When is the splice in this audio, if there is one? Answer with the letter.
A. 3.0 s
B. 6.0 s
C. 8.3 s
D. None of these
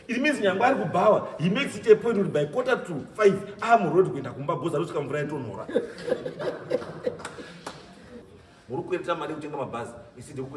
C